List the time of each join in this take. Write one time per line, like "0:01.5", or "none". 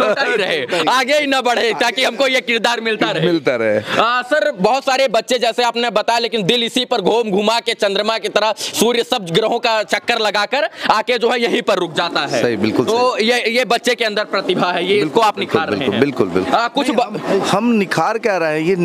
none